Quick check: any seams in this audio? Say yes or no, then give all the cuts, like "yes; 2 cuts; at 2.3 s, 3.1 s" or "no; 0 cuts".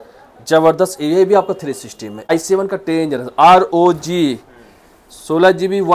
yes; 1 cut; at 2.3 s